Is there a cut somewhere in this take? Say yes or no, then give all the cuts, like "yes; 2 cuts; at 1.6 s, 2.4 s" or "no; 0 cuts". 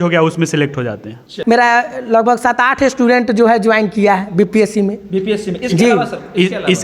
yes; 1 cut; at 1.3 s